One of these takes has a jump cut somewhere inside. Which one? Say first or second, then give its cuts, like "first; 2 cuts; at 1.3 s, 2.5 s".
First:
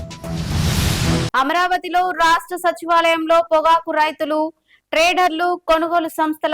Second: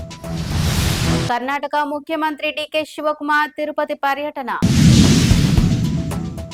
first; 1 cut; at 1.3 s